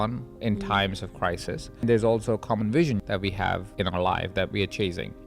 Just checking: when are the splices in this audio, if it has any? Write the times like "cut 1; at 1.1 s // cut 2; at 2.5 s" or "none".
cut 1; at 1.8 s // cut 2; at 3.4 s

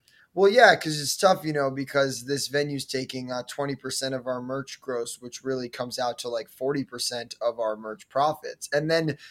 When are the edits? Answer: none

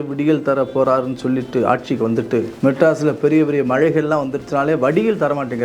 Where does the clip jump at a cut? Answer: cut 1; at 2.5 s

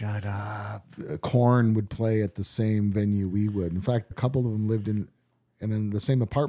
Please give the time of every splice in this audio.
cut 1; at 4.1 s

